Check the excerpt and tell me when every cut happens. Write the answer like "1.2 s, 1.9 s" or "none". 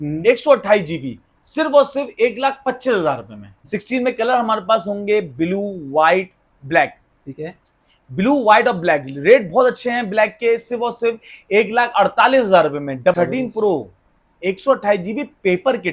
3.6 s, 13.2 s